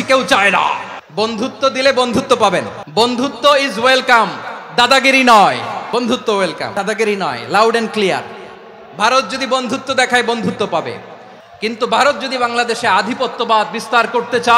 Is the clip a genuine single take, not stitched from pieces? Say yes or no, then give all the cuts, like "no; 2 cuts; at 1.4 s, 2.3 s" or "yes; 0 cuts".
no; 4 cuts; at 1.0 s, 2.8 s, 5.8 s, 6.7 s